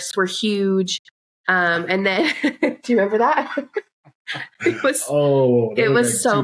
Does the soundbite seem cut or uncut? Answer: uncut